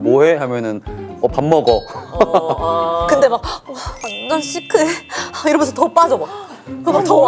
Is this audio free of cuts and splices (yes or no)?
no